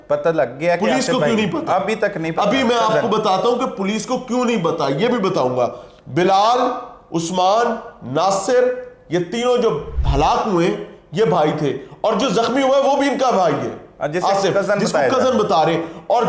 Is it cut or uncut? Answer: uncut